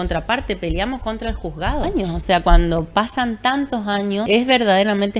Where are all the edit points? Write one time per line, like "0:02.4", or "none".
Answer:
0:01.9
0:04.3